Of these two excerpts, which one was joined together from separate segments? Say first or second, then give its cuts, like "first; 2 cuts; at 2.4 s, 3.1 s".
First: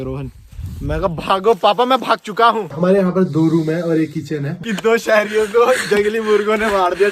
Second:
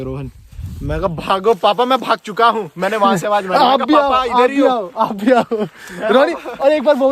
first; 2 cuts; at 2.7 s, 4.5 s